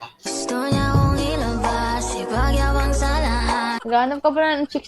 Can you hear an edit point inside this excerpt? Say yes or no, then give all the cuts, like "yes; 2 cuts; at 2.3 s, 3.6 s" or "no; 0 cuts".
yes; 1 cut; at 3.8 s